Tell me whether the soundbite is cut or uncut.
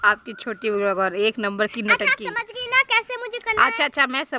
uncut